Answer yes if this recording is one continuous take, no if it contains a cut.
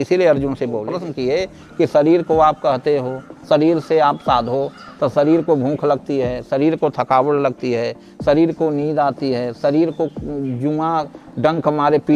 no